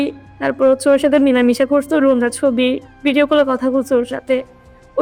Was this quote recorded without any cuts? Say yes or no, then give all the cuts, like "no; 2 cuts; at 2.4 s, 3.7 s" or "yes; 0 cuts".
yes; 0 cuts